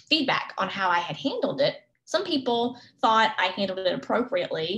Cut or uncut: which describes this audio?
cut